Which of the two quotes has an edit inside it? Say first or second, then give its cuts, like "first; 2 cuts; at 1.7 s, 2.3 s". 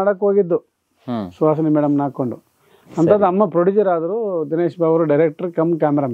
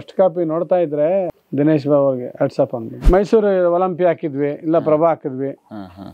second; 2 cuts; at 1.4 s, 2.9 s